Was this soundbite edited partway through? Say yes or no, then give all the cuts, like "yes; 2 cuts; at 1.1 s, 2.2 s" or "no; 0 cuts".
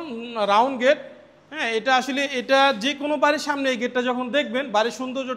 no; 0 cuts